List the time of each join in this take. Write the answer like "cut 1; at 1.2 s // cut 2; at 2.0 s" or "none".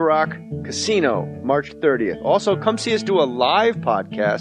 cut 1; at 1.8 s